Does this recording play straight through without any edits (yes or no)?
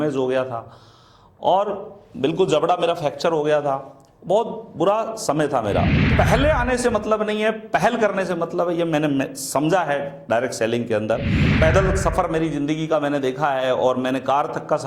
no